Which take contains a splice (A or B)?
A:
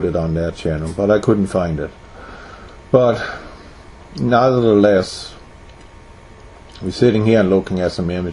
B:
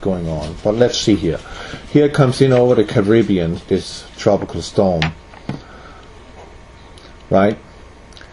B